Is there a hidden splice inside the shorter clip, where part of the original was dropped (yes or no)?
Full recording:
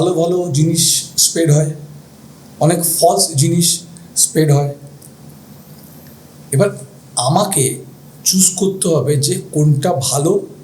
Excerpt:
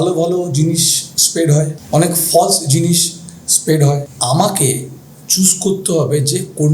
yes